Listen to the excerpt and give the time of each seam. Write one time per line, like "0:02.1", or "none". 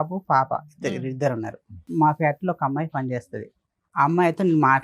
0:01.9